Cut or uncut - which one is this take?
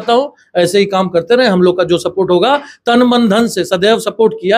uncut